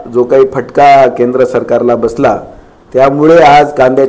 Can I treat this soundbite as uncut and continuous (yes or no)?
yes